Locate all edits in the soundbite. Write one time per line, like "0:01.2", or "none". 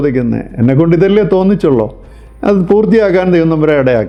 none

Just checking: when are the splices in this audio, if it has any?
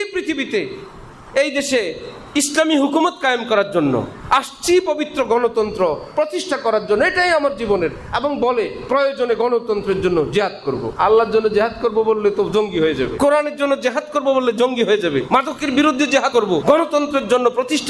0:10.9
0:13.1
0:15.2
0:16.4

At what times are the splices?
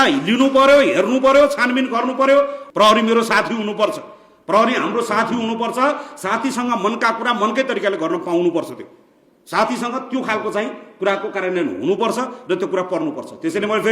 0:02.6

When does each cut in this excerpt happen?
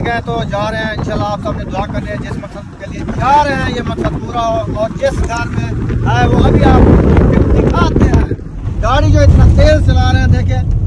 none

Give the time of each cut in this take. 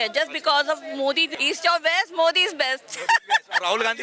0:01.3

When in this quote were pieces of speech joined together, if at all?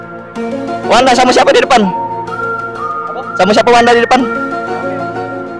0:00.8
0:04.2

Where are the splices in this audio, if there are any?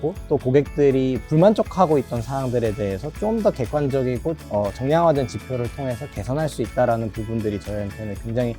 none

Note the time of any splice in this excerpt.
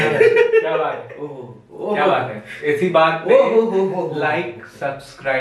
none

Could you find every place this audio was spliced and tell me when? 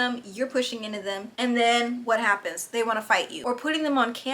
0:03.4

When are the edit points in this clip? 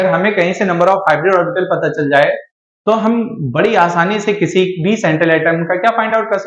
none

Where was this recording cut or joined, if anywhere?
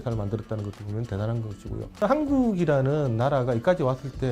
0:02.0

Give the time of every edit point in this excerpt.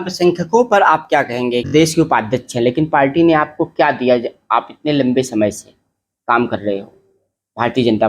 0:01.7

